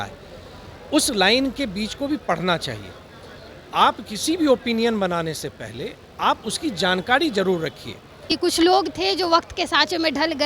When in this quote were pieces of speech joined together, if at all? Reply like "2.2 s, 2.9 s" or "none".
8.4 s